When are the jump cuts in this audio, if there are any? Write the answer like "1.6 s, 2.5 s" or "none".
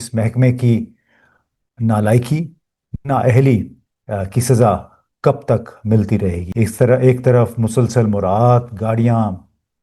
6.4 s